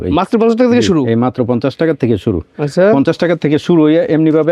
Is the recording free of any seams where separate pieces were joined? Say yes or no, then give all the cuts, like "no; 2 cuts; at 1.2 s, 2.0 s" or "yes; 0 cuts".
yes; 0 cuts